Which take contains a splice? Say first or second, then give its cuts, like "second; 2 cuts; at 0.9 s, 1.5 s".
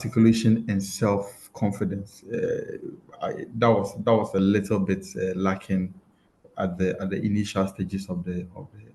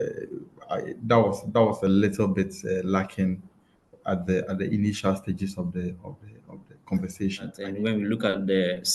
second; 1 cut; at 7.6 s